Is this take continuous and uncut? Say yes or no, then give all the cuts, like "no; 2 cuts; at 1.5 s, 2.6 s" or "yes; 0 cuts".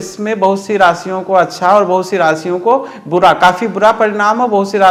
yes; 0 cuts